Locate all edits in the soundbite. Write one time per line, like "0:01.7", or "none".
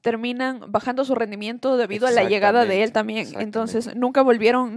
none